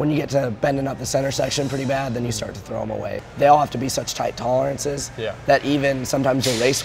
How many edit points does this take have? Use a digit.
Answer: 1